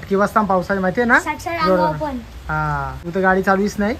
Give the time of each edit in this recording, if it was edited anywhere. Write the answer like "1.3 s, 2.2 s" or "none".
3.0 s